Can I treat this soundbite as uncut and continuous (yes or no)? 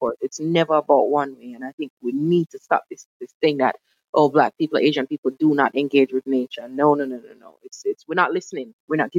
yes